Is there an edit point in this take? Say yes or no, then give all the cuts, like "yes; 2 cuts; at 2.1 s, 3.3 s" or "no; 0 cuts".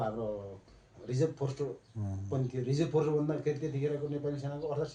no; 0 cuts